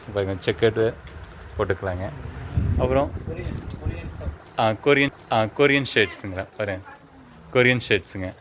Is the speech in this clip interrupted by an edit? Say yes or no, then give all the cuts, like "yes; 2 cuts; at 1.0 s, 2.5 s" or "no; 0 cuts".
no; 0 cuts